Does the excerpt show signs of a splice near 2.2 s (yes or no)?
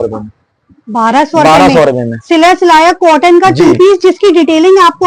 no